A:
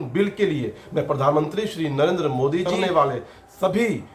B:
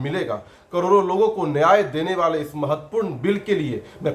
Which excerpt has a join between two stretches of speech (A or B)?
A